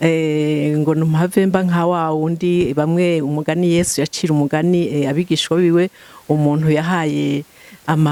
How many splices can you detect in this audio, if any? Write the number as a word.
zero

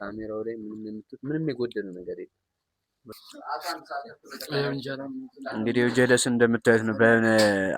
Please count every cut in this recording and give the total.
one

